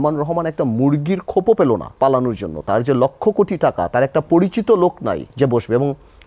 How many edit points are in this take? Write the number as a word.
two